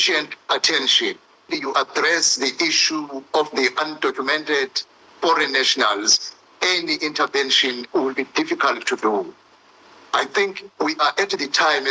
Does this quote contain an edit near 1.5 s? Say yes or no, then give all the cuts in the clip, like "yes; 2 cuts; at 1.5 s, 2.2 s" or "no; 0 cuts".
yes; 1 cut; at 1.5 s